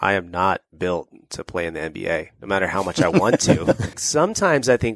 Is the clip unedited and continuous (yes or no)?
no